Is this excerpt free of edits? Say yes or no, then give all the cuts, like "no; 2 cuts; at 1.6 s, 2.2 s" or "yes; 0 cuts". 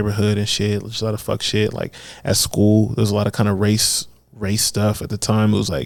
yes; 0 cuts